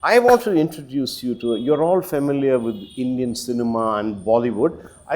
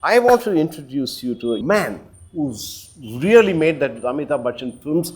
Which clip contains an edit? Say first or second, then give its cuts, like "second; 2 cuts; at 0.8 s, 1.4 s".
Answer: second; 1 cut; at 1.6 s